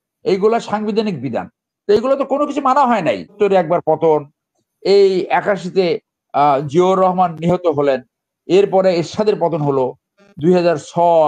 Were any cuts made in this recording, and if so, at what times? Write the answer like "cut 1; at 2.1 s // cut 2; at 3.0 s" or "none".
cut 1; at 3.3 s